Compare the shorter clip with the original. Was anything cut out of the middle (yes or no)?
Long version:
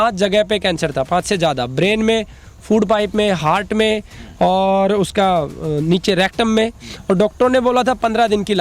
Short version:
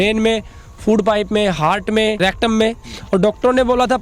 yes